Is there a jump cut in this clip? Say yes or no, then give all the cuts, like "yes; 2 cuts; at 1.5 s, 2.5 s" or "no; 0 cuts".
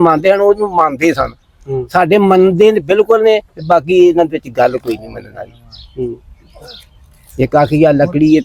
no; 0 cuts